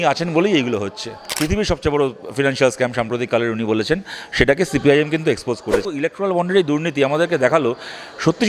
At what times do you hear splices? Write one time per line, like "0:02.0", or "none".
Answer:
0:01.4
0:05.8